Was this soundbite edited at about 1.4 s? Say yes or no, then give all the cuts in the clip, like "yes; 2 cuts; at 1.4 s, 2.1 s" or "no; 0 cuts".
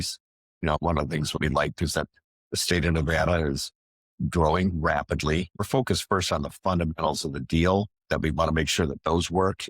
yes; 2 cuts; at 1.4 s, 5.6 s